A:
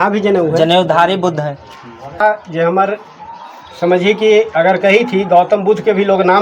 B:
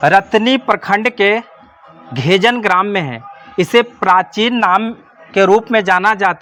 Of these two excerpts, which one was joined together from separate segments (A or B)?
A